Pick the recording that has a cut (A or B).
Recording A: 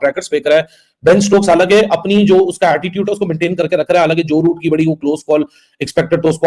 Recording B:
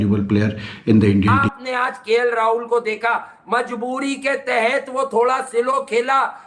B